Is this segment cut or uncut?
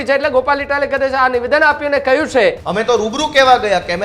cut